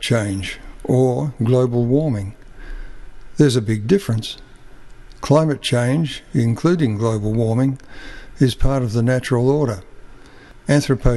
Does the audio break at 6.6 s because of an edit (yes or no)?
yes